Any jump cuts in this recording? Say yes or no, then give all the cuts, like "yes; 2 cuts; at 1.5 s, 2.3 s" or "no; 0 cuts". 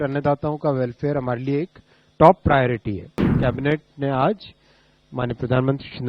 yes; 1 cut; at 3.3 s